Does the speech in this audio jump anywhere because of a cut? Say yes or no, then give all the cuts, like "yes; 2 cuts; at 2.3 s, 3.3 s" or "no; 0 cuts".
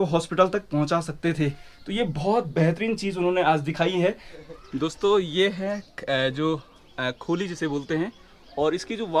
yes; 1 cut; at 4.3 s